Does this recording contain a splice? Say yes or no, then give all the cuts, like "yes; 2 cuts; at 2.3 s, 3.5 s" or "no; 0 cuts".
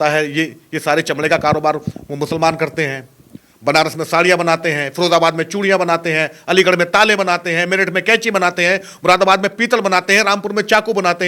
no; 0 cuts